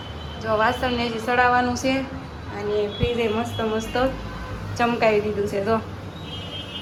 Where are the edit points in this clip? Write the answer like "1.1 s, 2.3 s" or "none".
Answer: none